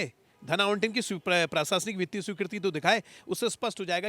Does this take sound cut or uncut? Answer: uncut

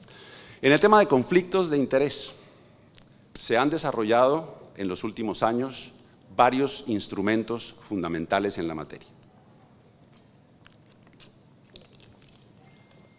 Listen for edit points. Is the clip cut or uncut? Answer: cut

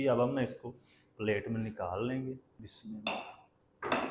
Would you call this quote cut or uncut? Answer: cut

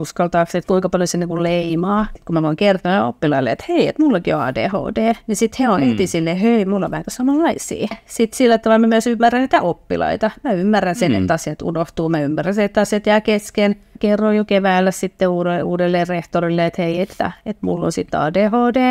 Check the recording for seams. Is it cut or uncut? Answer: cut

